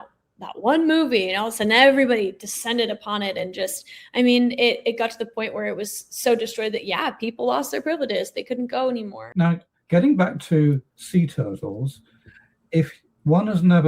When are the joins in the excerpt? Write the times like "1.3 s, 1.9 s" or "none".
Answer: 9.2 s